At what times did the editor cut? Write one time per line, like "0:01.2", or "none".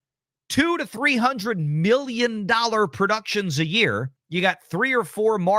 0:04.2